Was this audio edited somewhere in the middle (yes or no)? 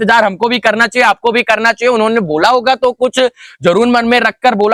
no